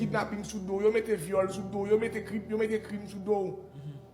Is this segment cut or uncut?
cut